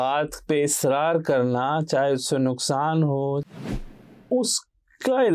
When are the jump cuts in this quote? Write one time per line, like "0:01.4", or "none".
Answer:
0:03.5